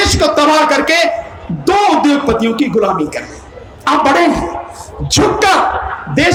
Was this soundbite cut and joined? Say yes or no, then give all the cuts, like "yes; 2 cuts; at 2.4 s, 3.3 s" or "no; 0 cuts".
no; 0 cuts